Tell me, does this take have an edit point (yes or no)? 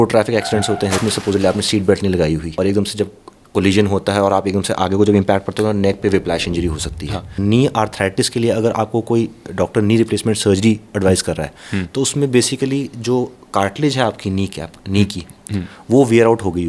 yes